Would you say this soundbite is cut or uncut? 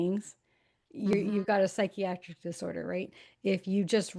uncut